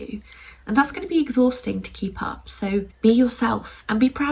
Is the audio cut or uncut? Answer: cut